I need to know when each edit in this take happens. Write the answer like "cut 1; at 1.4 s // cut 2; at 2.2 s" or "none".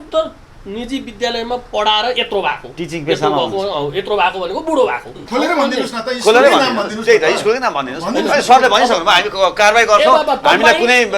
cut 1; at 5.2 s